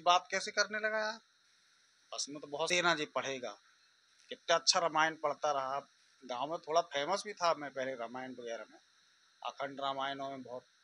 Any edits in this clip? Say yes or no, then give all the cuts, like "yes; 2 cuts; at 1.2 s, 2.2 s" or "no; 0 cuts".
yes; 1 cut; at 2.7 s